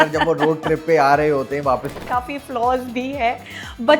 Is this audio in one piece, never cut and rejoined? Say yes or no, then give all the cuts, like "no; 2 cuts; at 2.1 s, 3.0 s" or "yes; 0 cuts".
no; 1 cut; at 2.0 s